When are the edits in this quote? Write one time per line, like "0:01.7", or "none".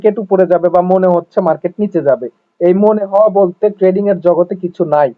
none